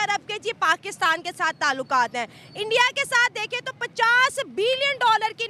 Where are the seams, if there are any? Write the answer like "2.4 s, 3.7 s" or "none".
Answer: none